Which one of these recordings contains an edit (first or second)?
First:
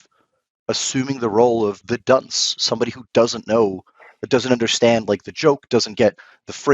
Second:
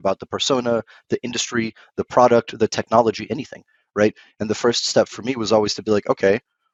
first